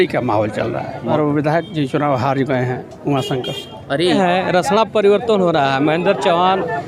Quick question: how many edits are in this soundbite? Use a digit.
2